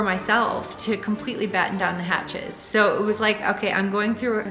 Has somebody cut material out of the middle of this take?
no; 0 cuts

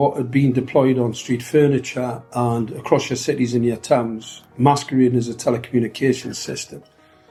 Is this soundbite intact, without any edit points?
yes; 0 cuts

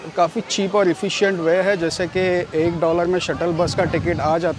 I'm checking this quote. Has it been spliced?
no; 0 cuts

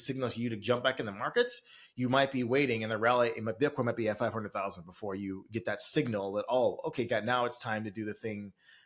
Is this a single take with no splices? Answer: yes; 0 cuts

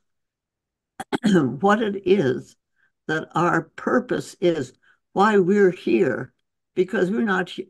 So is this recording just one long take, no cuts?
yes; 0 cuts

